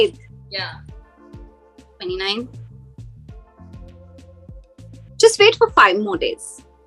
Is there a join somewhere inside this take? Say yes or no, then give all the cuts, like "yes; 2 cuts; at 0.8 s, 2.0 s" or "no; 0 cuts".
yes; 2 cuts; at 0.8 s, 2.0 s